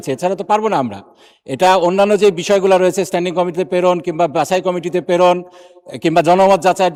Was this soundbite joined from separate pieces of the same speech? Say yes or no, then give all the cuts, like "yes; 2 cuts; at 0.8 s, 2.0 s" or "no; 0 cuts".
no; 0 cuts